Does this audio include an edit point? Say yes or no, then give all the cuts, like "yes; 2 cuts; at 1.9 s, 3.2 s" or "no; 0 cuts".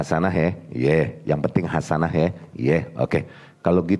no; 0 cuts